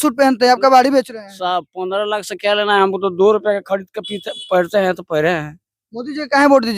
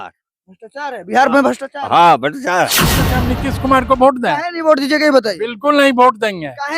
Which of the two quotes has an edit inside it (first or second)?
second